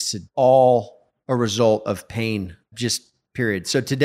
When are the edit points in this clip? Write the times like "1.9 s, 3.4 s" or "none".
2.7 s